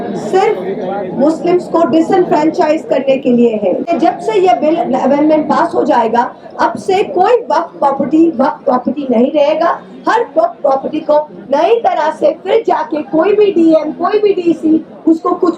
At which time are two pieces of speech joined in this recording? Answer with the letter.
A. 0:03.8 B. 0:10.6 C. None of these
A